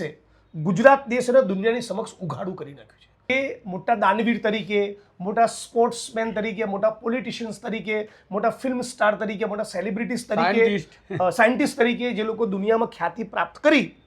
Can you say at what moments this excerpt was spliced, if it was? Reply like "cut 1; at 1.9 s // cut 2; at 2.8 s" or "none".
cut 1; at 3.3 s